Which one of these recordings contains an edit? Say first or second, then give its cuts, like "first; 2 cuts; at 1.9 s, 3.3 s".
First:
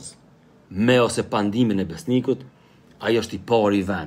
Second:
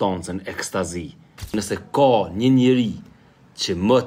second; 1 cut; at 1.5 s